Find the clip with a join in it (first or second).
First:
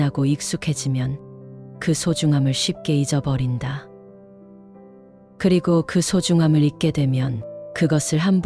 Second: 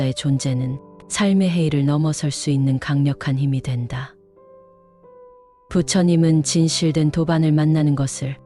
second